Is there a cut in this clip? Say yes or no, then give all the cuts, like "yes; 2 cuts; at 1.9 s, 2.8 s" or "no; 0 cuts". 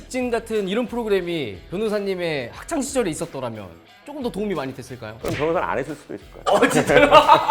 no; 0 cuts